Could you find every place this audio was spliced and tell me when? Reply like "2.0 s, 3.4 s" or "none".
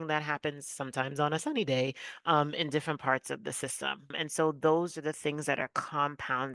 4.1 s